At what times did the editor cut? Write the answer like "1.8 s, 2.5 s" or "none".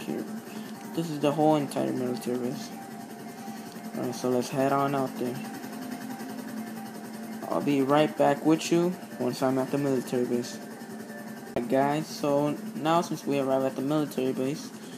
9.6 s

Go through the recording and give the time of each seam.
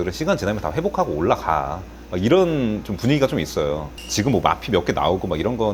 none

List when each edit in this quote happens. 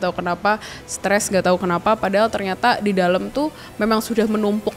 none

